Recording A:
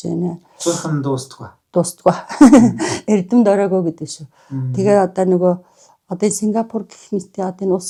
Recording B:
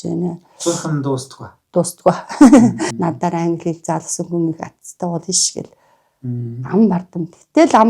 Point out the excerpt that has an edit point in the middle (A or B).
B